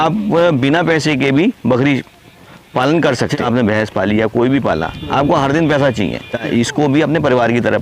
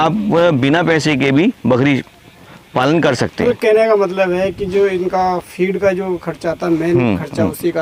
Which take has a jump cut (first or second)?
first